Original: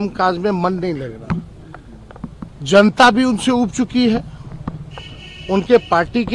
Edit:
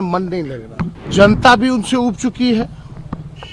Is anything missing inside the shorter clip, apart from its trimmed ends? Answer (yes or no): yes